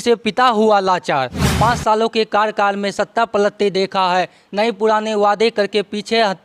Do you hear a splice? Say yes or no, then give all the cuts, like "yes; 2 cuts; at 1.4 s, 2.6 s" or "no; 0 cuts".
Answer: yes; 1 cut; at 1.4 s